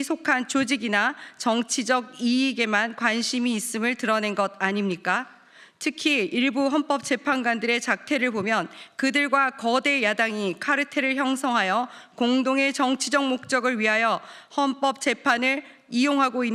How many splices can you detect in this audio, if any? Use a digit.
0